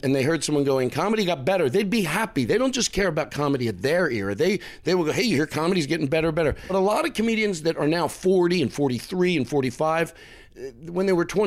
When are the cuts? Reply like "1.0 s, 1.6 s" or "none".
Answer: 6.6 s